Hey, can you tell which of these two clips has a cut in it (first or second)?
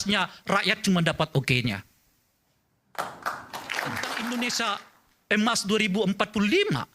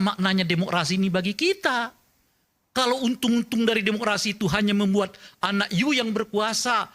first